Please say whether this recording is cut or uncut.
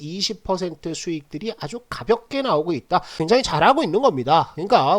cut